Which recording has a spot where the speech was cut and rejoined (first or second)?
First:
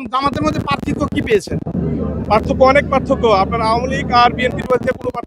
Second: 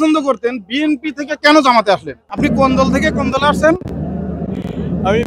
second